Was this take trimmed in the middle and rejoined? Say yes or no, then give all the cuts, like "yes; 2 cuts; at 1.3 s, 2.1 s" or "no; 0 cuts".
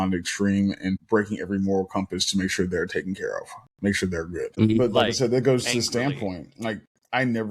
yes; 2 cuts; at 1.0 s, 4.8 s